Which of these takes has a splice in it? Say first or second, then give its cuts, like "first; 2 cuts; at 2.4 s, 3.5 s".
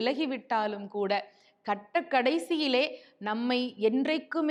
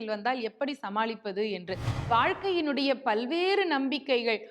second; 1 cut; at 2.1 s